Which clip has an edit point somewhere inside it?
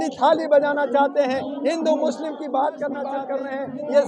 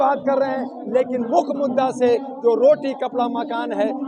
first; 1 cut; at 3.2 s

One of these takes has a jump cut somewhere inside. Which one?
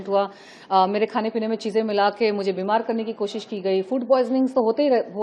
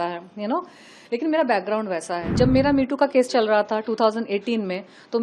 second; 1 cut; at 2.2 s

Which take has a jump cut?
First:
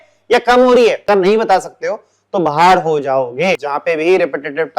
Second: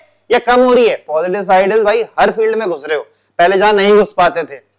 first; 2 cuts; at 1.0 s, 3.7 s

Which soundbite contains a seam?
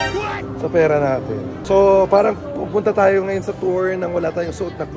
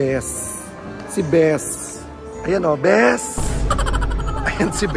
first; 1 cut; at 1.5 s

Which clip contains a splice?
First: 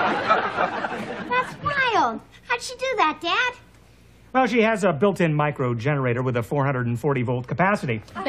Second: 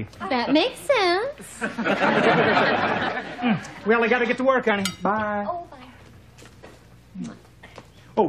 first; 1 cut; at 2.0 s

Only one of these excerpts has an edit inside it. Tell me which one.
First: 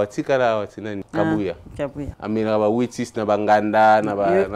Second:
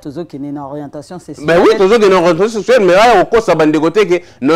first; 2 cuts; at 1.0 s, 2.1 s

